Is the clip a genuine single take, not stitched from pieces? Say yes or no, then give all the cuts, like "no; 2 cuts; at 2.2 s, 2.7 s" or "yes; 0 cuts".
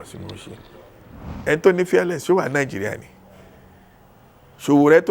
no; 1 cut; at 1.3 s